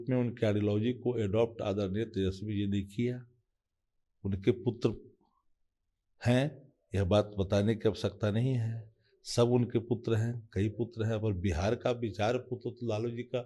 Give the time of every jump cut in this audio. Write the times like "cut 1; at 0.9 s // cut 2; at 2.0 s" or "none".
none